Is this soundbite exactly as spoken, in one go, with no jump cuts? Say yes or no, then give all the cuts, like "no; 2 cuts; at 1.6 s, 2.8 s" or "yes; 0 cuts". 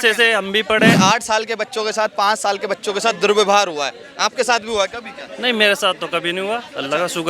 no; 1 cut; at 1.0 s